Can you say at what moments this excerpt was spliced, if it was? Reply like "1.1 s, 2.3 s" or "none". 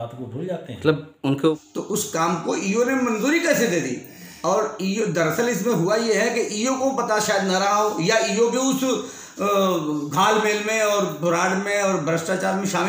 1.6 s